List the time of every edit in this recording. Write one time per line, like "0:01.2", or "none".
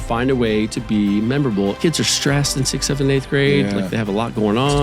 0:01.8